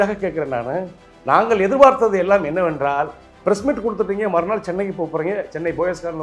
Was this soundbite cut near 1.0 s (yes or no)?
no